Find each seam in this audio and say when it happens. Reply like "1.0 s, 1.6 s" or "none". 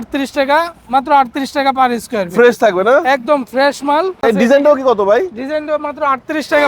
4.2 s